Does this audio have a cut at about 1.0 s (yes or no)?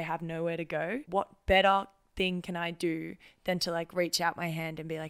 yes